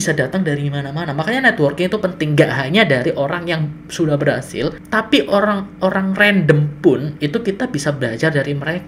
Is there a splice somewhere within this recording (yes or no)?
yes